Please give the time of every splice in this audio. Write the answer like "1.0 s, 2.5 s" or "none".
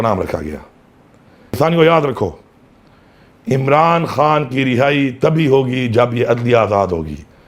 1.6 s